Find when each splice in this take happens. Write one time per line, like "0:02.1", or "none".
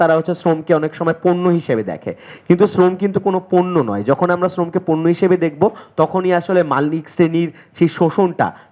none